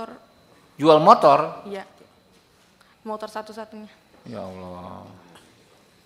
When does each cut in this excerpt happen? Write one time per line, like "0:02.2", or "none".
none